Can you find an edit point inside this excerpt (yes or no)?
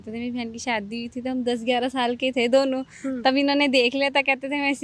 no